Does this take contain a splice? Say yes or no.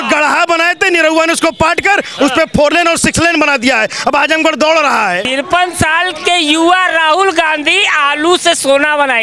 yes